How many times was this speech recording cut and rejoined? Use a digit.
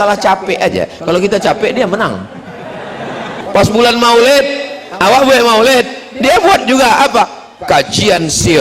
1